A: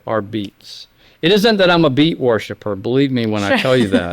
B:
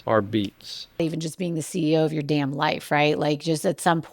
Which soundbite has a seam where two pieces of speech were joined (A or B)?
B